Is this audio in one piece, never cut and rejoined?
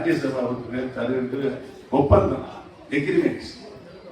yes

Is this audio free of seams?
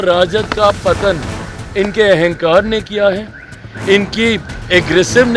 yes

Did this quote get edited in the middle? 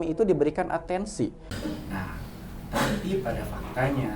yes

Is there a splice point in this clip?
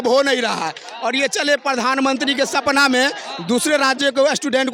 no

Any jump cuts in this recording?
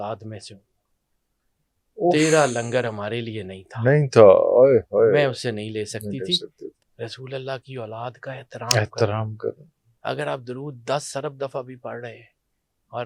yes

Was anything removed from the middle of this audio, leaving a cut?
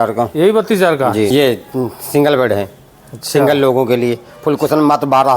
yes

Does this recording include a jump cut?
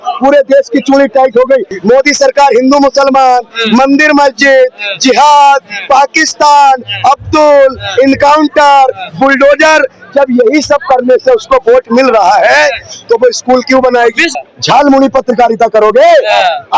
yes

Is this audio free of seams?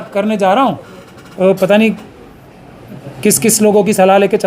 no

